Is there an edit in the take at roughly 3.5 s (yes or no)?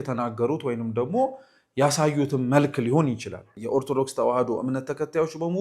yes